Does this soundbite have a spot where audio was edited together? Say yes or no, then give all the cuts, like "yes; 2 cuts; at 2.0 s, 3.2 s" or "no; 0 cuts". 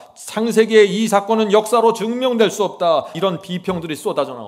yes; 1 cut; at 3.1 s